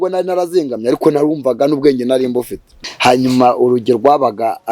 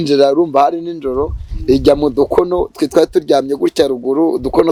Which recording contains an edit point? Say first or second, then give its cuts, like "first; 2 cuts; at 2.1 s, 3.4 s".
first; 1 cut; at 2.9 s